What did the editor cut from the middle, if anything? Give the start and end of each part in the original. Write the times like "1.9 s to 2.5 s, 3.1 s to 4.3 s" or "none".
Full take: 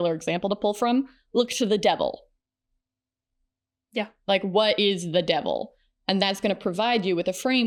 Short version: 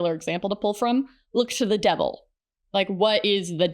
2.6 s to 4.1 s